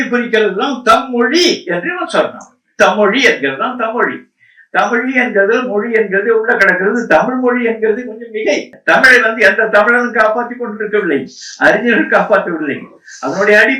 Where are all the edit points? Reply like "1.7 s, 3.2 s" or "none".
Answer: 8.8 s

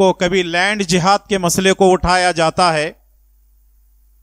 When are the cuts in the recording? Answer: none

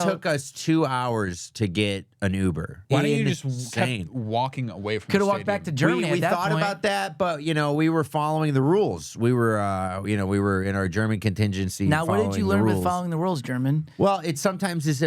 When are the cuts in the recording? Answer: 2.8 s

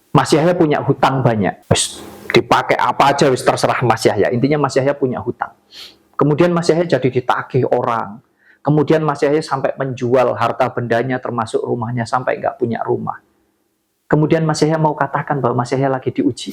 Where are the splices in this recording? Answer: 1.6 s

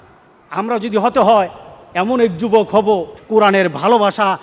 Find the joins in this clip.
3.1 s

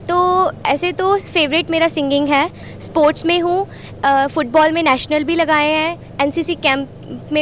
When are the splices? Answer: 2.7 s

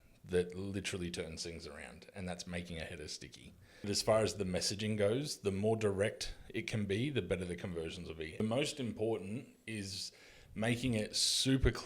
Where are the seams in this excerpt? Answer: 3.9 s, 8.4 s

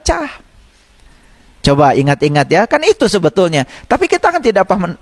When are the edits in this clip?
none

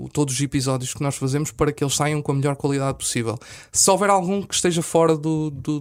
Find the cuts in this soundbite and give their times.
none

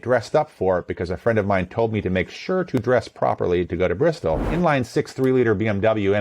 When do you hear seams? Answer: 4.5 s

